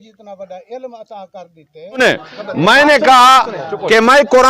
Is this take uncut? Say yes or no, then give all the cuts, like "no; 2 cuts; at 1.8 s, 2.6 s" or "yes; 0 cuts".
no; 1 cut; at 2.0 s